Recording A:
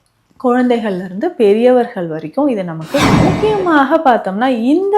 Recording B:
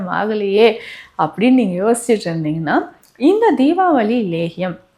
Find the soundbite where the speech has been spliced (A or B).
A